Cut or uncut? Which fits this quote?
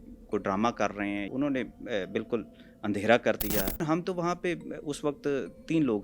cut